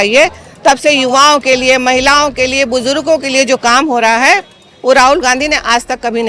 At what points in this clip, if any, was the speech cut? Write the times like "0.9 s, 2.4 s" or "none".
none